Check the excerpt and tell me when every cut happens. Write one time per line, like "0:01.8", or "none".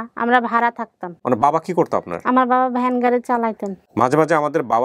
0:01.2
0:03.7

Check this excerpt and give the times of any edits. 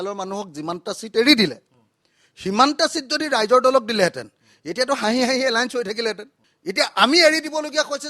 none

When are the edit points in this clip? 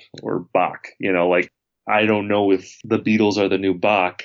0:01.6
0:02.7

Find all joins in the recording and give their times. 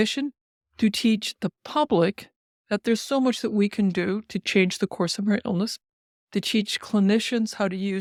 none

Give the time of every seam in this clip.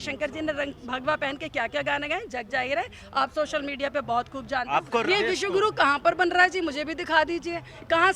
0:04.9

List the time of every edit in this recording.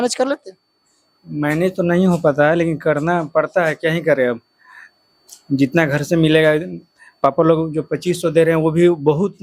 none

